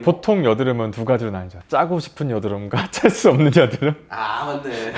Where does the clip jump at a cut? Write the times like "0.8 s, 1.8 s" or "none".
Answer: none